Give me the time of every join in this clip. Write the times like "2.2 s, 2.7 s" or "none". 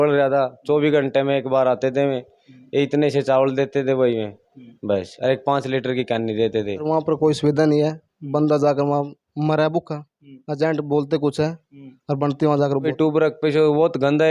6.8 s, 12.9 s